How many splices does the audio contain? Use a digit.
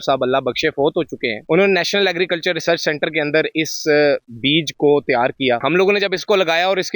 1